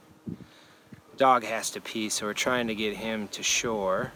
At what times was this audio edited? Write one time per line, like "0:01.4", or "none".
none